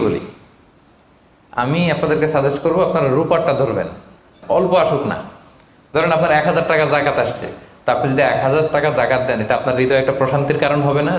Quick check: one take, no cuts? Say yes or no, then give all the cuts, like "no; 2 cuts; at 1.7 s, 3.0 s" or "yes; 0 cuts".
no; 1 cut; at 4.4 s